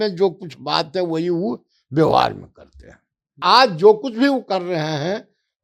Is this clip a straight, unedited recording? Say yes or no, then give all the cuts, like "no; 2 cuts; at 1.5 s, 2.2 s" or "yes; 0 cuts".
no; 1 cut; at 3.3 s